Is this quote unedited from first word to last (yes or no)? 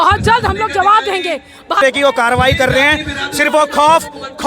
yes